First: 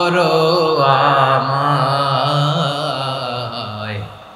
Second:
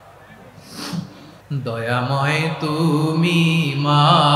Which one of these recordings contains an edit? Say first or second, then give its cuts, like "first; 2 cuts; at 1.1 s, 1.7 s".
second; 1 cut; at 1.3 s